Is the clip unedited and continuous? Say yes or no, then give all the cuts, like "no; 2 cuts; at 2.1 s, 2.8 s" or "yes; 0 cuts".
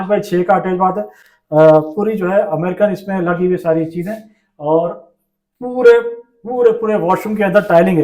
yes; 0 cuts